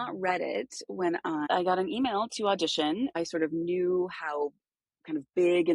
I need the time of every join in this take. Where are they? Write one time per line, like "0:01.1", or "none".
0:01.4
0:03.1

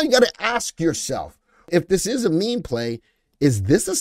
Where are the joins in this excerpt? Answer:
0:01.7

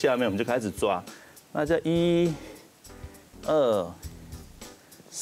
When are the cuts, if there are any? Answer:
none

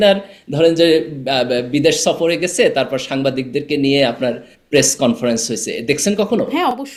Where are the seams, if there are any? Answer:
none

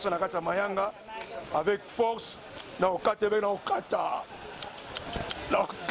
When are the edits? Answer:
none

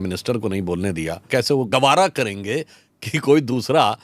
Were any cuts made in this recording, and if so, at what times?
0:01.7

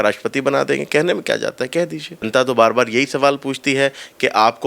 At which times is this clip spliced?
0:02.3

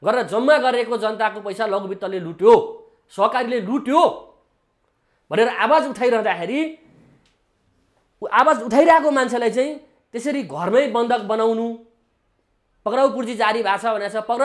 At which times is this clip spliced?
none

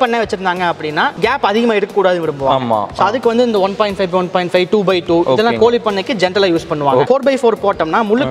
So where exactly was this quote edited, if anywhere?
0:01.1
0:07.1

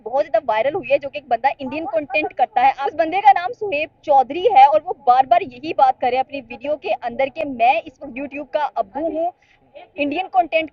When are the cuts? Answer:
0:02.8

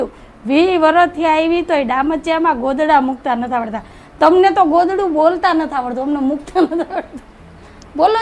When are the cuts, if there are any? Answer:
none

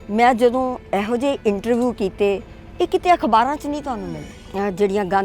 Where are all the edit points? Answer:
0:03.8

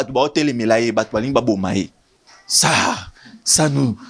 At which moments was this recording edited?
none

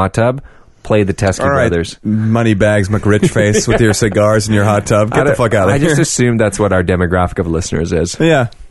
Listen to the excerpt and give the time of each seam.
none

